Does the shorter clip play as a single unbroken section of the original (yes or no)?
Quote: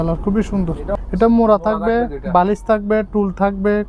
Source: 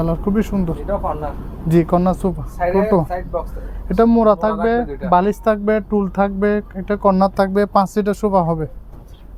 no